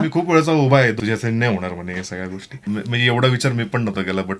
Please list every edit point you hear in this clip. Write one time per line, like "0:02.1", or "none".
0:01.0
0:02.5